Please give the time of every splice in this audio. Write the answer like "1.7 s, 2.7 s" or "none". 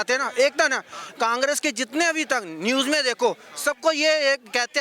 none

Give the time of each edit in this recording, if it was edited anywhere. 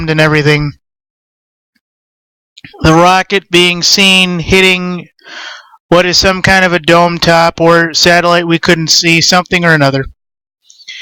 4.8 s

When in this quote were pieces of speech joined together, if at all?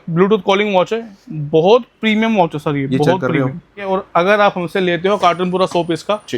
3.9 s

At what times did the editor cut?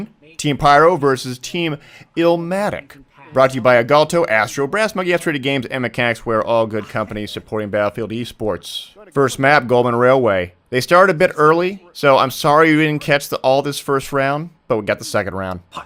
none

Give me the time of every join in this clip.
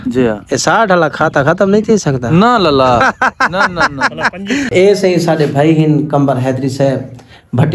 4.7 s

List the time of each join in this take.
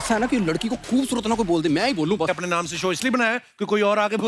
2.3 s

